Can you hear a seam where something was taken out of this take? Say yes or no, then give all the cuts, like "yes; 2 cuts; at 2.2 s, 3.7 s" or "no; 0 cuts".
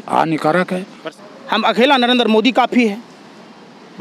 yes; 1 cut; at 1.0 s